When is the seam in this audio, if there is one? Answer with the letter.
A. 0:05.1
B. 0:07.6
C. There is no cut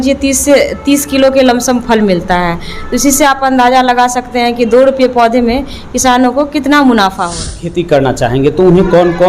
B